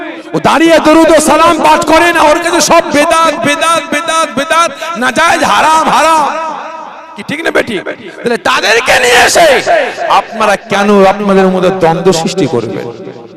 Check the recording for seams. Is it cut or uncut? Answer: uncut